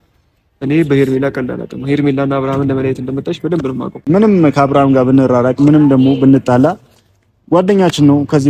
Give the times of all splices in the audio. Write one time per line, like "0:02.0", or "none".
0:04.0